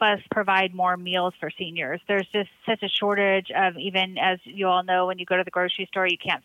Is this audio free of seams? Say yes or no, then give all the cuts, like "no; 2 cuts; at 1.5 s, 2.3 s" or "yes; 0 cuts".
yes; 0 cuts